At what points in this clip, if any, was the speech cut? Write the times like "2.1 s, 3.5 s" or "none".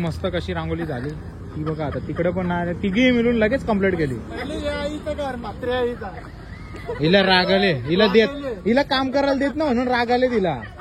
none